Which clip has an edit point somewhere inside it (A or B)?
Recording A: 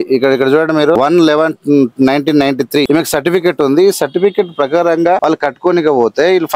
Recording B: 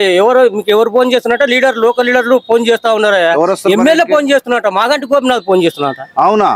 A